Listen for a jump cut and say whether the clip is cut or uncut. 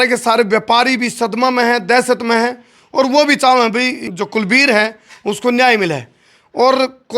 cut